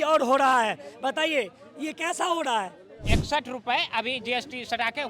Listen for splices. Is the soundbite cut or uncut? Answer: cut